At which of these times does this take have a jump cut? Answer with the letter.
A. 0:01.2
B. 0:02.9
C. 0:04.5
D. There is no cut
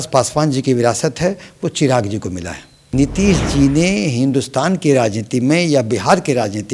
B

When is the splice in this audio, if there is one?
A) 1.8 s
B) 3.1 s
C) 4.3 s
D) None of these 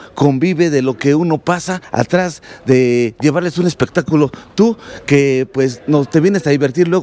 A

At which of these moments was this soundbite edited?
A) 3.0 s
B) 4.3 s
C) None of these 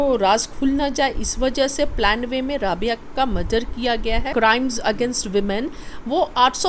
B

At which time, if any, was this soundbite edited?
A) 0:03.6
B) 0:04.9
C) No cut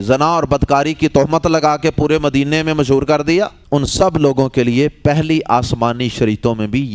A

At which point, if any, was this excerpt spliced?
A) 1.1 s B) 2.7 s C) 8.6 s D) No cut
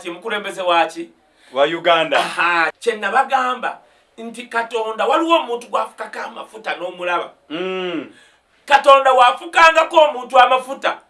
B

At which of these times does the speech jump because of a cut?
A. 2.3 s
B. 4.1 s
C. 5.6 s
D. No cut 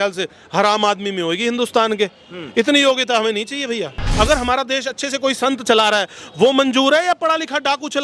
B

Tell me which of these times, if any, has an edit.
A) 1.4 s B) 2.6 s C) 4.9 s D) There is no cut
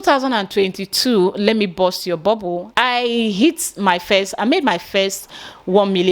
B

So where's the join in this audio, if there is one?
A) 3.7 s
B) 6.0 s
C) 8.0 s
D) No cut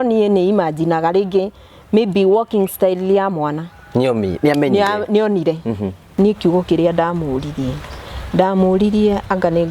B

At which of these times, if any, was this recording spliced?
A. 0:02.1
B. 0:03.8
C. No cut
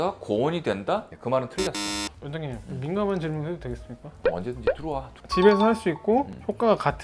A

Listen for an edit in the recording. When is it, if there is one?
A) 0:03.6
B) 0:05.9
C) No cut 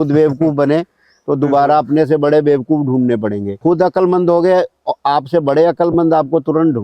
A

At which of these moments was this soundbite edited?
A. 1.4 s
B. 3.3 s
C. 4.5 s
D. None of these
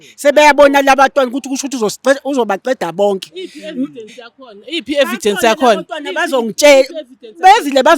D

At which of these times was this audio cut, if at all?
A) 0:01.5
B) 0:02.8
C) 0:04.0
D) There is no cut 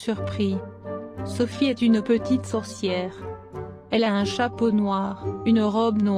D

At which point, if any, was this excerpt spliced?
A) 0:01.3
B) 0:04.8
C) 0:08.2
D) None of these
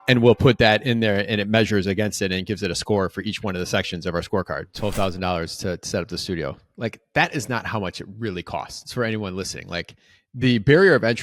B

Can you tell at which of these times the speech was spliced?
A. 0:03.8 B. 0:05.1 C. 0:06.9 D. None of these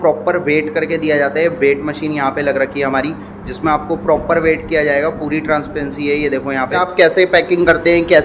C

